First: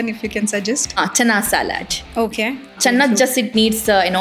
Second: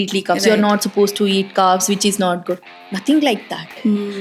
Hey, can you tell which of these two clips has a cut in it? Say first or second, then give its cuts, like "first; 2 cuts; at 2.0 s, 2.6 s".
first; 2 cuts; at 0.9 s, 2.8 s